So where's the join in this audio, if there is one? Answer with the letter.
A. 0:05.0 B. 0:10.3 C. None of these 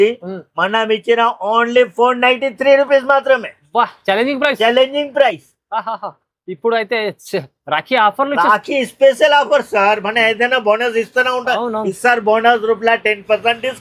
C